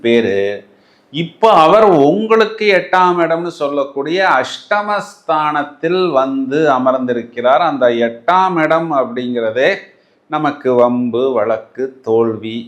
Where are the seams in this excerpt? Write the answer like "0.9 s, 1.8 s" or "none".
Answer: none